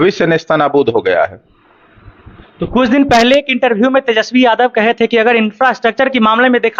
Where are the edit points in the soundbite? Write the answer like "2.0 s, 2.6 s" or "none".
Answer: none

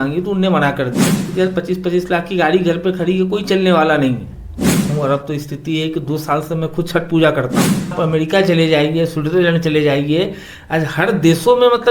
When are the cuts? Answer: 1.3 s, 4.9 s, 7.9 s

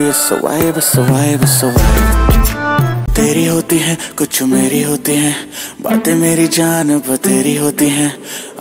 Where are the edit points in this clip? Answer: 3.1 s

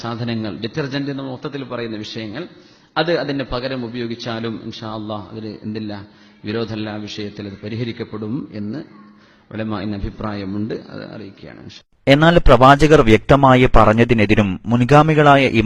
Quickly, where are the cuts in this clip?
7.5 s

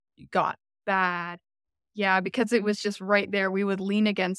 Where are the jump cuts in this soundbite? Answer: none

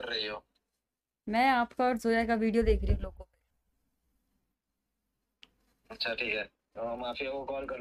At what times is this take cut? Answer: none

